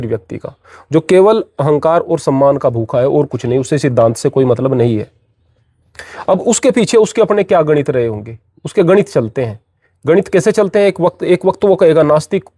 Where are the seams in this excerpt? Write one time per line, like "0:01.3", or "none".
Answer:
none